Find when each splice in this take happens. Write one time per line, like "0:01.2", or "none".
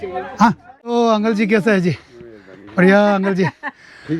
0:00.9